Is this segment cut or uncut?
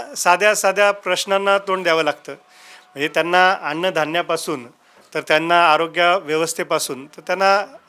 uncut